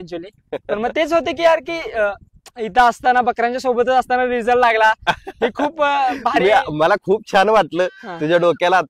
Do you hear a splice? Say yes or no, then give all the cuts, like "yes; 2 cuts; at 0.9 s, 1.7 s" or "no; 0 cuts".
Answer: no; 0 cuts